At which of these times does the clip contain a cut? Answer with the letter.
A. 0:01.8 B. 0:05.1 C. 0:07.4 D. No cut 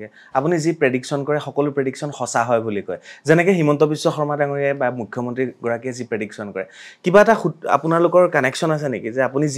D